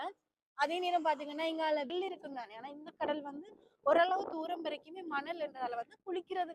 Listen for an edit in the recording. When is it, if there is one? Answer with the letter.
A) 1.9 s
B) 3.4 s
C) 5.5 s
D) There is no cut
A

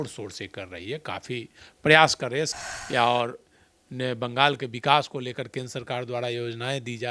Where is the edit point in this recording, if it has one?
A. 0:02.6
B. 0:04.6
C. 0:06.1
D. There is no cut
A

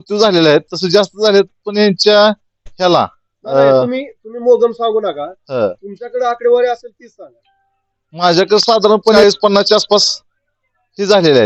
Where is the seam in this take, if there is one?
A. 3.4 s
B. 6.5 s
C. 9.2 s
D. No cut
C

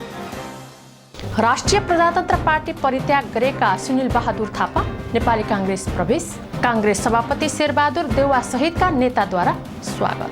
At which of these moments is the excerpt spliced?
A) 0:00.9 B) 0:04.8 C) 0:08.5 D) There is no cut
D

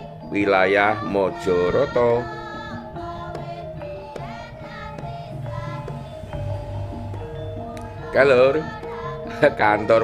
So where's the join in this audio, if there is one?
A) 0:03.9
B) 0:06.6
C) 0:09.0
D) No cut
D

